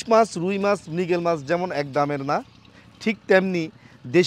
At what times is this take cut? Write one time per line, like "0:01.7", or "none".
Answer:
none